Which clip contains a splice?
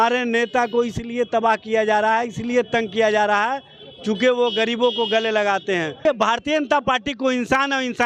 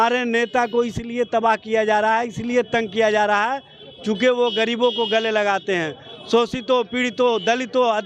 first; 1 cut; at 6.0 s

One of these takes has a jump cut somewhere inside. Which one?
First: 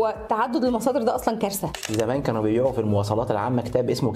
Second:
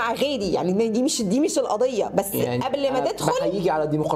first; 1 cut; at 1.9 s

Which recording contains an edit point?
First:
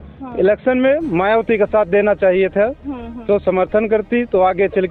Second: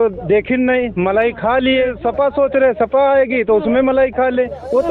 second; 1 cut; at 2.0 s

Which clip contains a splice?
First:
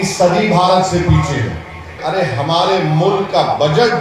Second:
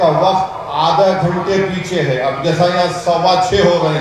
first; 1 cut; at 2.0 s

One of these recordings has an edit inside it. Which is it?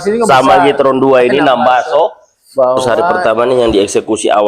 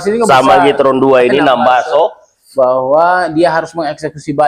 first; 1 cut; at 2.8 s

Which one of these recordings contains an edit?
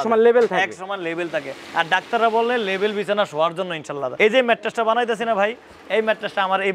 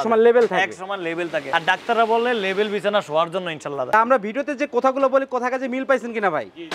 second; 2 cuts; at 1.4 s, 3.9 s

